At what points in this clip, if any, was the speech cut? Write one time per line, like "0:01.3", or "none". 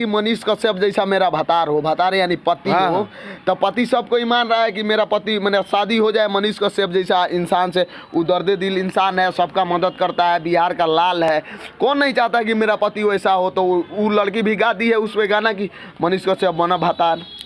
none